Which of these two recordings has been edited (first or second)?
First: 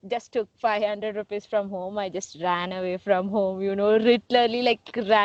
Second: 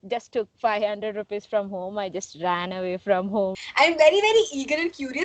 second